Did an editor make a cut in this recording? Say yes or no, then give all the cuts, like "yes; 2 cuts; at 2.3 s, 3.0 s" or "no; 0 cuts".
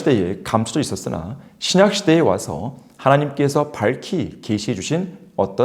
no; 0 cuts